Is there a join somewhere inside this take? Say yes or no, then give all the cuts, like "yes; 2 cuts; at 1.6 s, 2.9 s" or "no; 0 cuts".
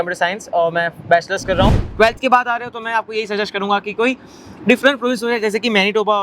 yes; 1 cut; at 1.8 s